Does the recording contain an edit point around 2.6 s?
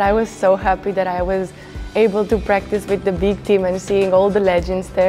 no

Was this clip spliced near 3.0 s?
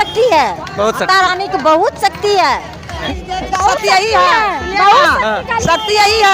yes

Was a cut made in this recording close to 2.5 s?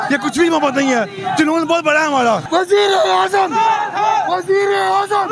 yes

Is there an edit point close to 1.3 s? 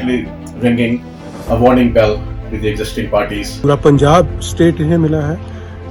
no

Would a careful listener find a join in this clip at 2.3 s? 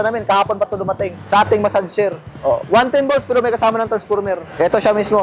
yes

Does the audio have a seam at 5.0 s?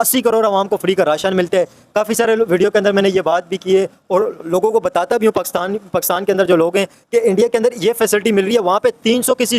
no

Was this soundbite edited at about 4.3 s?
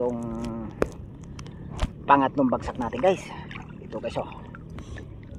no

